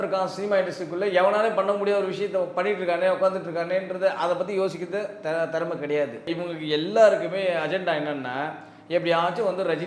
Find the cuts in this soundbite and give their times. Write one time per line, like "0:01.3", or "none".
0:06.4